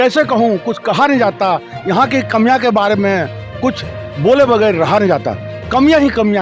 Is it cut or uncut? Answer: uncut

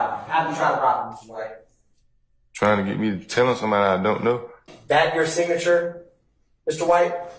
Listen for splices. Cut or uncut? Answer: uncut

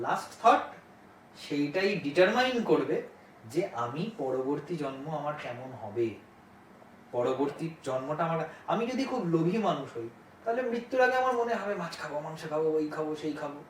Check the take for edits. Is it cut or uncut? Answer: uncut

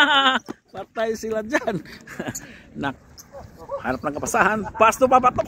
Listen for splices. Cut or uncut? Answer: cut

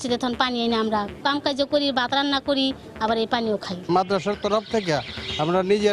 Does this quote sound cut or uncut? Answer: cut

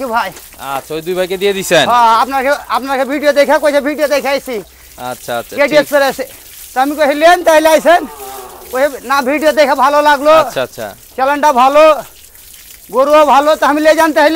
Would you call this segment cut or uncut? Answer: uncut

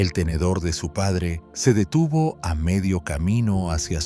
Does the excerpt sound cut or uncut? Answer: cut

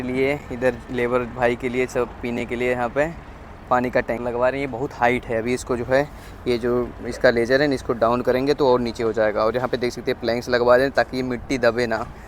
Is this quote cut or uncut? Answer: cut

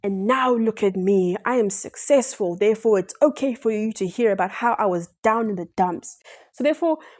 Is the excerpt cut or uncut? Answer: uncut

